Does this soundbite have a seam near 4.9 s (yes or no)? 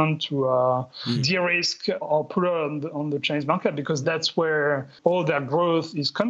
yes